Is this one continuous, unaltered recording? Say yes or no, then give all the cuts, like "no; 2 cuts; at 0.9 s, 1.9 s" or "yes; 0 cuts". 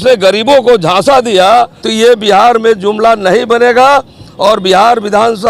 no; 1 cut; at 1.8 s